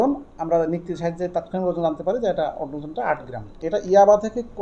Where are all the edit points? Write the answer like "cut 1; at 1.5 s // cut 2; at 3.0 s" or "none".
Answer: cut 1; at 3.5 s